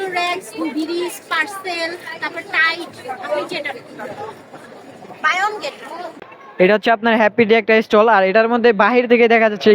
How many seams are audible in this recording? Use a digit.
1